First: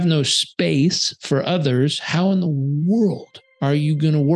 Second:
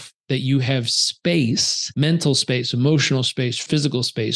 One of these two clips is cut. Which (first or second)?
second